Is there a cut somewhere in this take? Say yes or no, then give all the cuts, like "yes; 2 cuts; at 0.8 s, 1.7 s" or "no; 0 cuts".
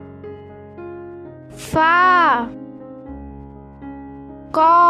no; 0 cuts